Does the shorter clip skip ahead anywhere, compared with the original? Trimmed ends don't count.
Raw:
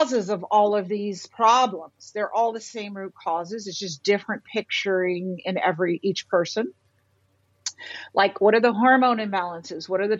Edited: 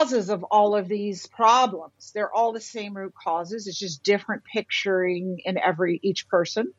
no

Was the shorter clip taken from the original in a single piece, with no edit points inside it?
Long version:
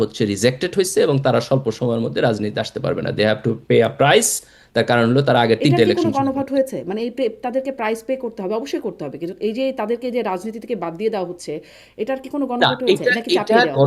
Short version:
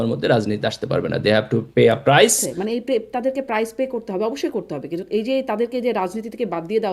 no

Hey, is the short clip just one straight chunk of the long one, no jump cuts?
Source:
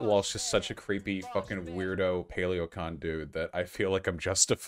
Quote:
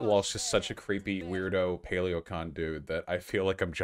no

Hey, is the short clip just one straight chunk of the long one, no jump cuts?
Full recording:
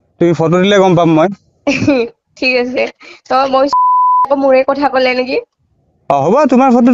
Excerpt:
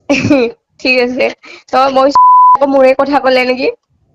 no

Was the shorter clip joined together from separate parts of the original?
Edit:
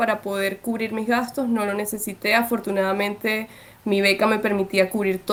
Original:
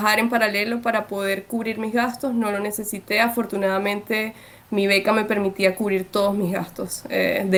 no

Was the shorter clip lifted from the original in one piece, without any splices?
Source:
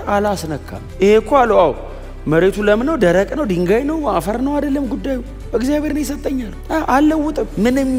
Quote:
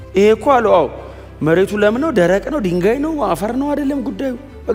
yes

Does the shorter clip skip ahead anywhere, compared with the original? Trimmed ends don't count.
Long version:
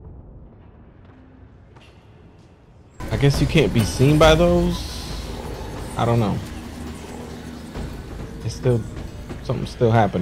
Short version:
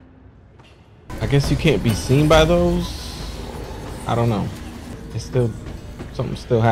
yes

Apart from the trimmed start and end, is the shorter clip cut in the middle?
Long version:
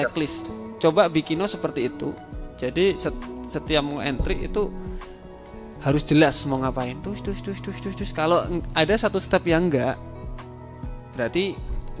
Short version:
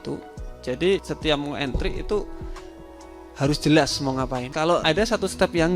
yes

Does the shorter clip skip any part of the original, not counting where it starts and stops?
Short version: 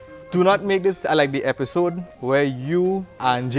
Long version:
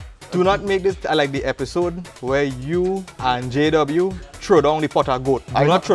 no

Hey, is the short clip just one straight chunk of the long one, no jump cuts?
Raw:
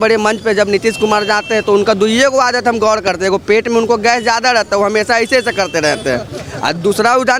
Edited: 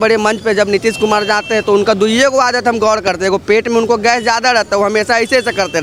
yes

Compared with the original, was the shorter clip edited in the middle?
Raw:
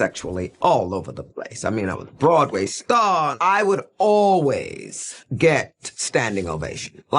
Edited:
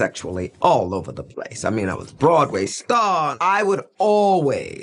no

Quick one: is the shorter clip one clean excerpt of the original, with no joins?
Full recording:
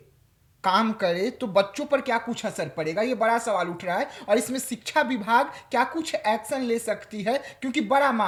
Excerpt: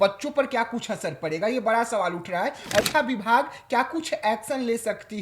no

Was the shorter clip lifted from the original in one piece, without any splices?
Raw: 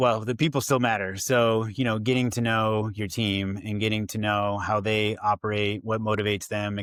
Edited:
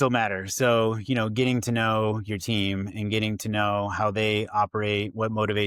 yes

